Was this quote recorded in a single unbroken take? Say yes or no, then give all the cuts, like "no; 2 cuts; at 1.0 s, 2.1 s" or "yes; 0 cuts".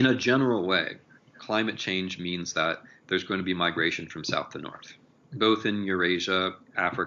yes; 0 cuts